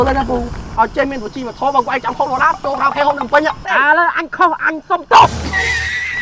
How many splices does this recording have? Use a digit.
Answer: 1